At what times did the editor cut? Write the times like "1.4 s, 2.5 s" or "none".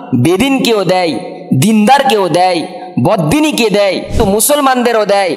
4.1 s

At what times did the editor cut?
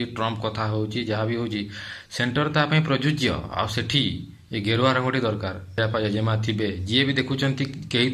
5.8 s

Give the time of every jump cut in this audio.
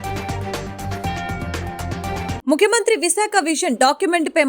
2.4 s

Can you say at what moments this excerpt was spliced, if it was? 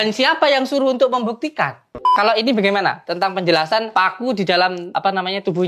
2.1 s, 3.9 s, 4.9 s

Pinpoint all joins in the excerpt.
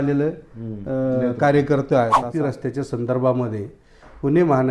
1.9 s

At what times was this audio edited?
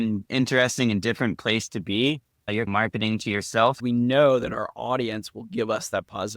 3.8 s

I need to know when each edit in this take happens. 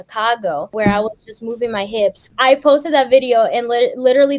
0.7 s, 2.2 s

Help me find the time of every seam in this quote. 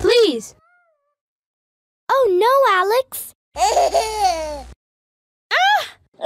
none

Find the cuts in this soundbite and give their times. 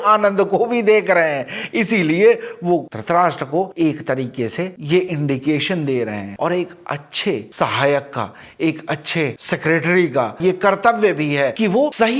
none

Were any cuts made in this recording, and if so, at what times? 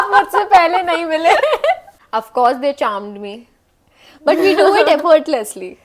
1.9 s

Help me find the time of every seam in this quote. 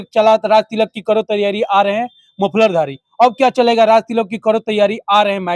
none

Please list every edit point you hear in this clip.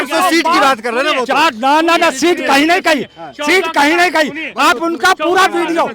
none

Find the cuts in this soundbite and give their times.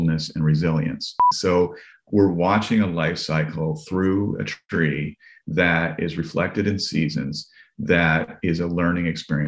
1.3 s

